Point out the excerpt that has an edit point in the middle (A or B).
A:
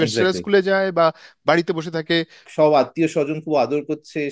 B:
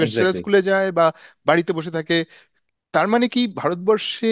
A